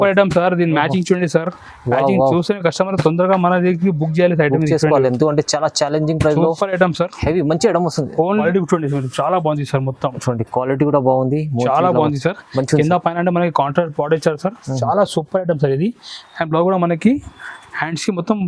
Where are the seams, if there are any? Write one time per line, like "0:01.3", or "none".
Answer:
0:08.4